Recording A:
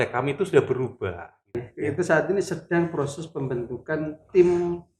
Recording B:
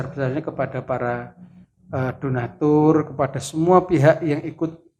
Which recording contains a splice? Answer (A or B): A